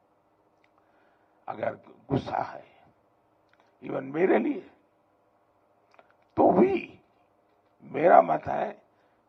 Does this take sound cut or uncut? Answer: uncut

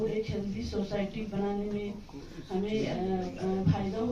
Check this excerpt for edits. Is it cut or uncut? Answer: uncut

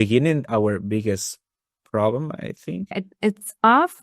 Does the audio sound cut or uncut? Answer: cut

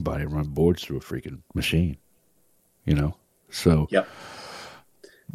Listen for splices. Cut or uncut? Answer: cut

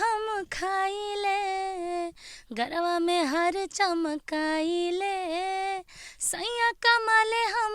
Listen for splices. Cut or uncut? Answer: uncut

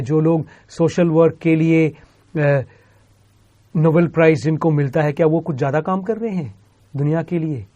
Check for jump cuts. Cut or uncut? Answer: uncut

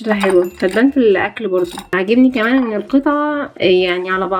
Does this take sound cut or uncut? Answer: cut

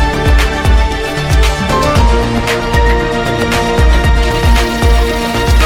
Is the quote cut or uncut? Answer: uncut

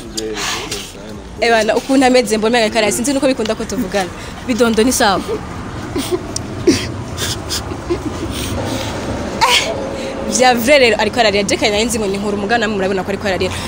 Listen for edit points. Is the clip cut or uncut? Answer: cut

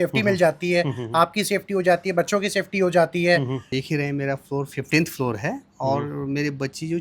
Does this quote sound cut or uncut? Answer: cut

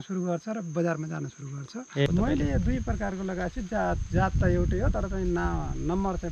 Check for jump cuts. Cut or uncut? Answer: cut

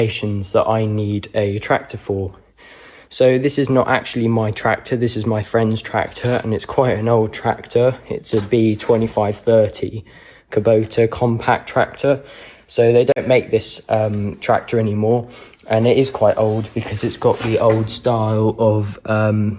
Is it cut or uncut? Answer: uncut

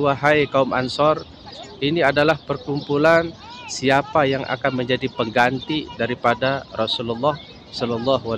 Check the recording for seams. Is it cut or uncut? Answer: uncut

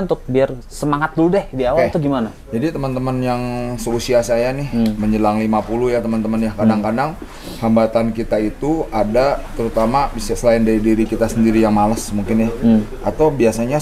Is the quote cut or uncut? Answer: uncut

